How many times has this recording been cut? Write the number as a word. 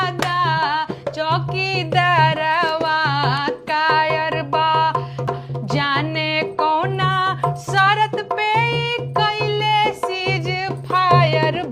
one